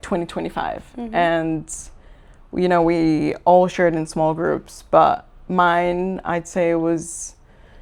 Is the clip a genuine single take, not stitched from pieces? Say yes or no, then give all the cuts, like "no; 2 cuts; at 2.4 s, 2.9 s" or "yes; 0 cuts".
yes; 0 cuts